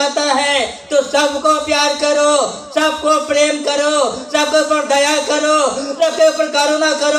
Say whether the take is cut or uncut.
uncut